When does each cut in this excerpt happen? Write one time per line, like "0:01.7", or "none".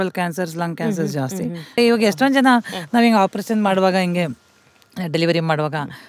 0:01.8